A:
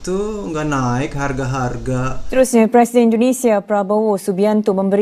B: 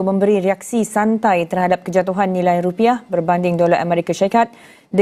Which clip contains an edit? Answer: A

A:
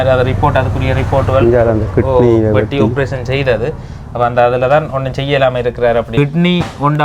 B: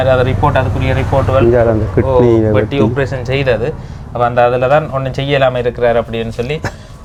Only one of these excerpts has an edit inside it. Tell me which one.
A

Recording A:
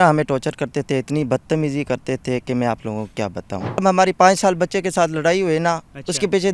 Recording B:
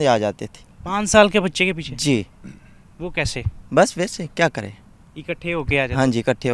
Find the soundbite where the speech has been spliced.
A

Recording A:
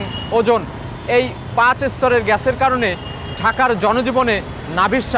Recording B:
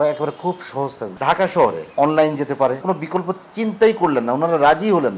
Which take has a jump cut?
B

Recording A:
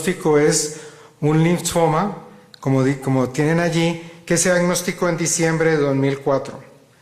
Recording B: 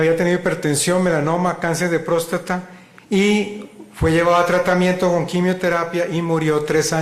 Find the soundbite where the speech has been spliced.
A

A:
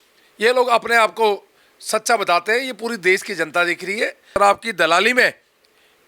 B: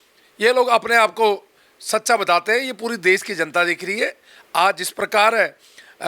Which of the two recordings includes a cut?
A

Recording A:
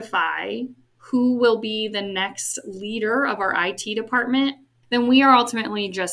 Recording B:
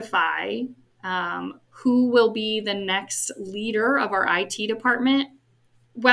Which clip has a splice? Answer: A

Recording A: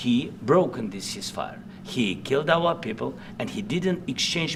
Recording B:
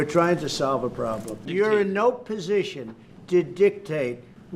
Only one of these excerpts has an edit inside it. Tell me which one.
B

